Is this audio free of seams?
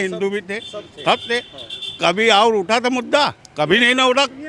no; 1 cut; at 3.4 s

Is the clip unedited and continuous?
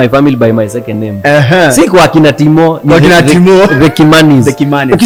yes; 0 cuts

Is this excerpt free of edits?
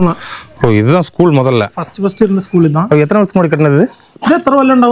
yes; 0 cuts

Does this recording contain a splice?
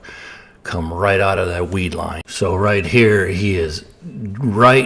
yes; 1 cut; at 2.2 s

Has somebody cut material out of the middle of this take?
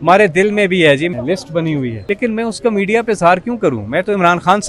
yes; 2 cuts; at 1.1 s, 2.0 s

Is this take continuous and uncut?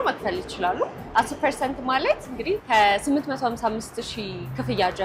yes; 0 cuts

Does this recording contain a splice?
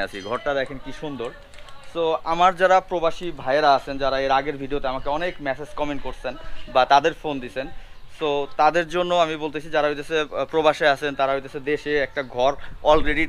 no; 0 cuts

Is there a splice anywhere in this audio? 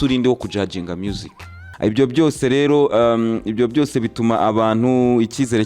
yes; 1 cut; at 1.6 s

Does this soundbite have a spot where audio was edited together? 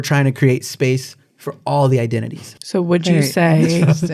yes; 1 cut; at 2.6 s

